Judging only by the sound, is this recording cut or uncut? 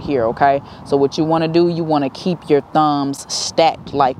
uncut